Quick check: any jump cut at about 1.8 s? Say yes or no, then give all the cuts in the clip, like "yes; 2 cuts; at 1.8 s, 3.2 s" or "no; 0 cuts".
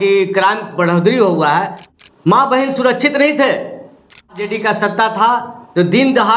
yes; 2 cuts; at 1.8 s, 4.4 s